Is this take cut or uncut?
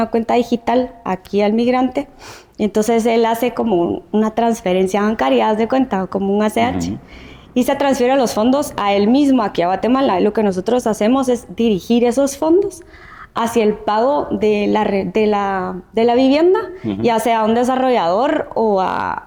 uncut